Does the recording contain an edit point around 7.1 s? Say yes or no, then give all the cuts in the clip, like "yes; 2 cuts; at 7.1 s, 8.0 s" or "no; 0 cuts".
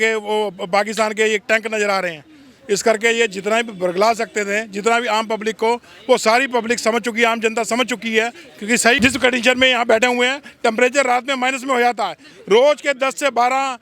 no; 1 cut; at 9.0 s